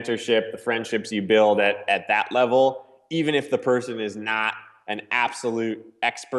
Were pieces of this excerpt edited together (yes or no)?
no